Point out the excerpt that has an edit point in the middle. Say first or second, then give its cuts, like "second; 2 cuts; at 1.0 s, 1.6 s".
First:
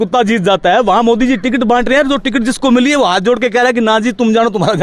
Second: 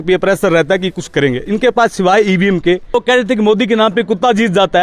second; 1 cut; at 2.9 s